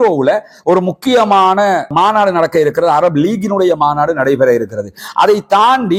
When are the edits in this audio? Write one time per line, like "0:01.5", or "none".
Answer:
none